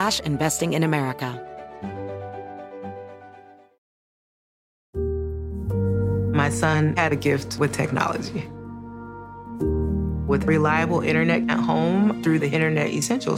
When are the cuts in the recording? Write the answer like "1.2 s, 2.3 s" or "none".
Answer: 1.3 s